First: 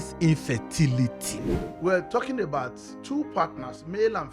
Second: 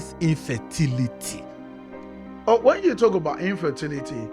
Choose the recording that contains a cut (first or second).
first